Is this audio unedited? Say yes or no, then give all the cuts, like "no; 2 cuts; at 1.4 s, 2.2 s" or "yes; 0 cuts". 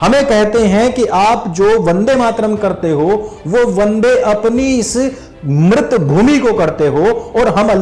yes; 0 cuts